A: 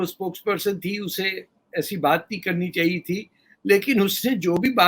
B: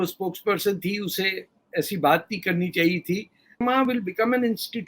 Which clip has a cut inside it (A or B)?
B